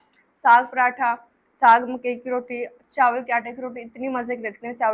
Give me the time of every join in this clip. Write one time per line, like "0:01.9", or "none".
none